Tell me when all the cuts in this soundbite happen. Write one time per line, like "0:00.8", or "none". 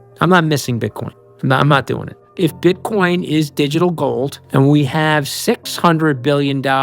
0:02.2
0:04.4

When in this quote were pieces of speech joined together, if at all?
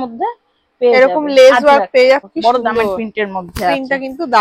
0:02.2

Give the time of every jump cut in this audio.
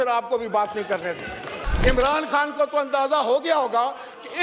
0:01.6

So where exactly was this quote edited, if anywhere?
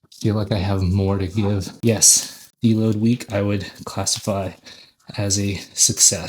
0:01.8

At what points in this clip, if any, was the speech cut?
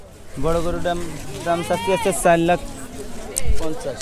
none

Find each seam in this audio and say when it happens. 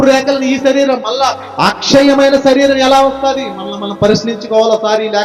none

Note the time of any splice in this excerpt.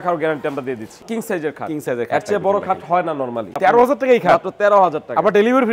0:01.0
0:03.5

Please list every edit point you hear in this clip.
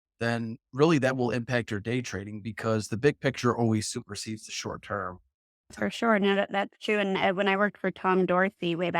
0:05.7

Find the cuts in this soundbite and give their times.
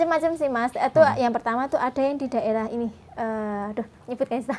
none

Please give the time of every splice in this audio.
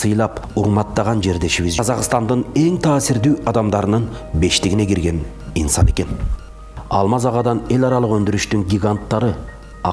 0:01.8

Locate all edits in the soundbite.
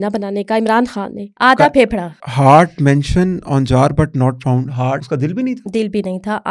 0:01.2
0:02.3
0:05.0

